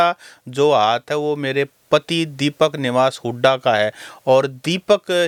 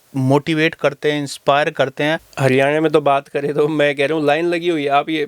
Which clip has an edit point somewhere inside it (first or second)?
second